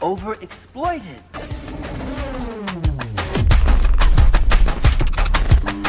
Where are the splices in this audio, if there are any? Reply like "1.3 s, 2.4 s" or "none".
1.1 s